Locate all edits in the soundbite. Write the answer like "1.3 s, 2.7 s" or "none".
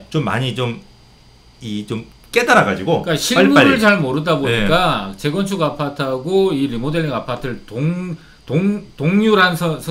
none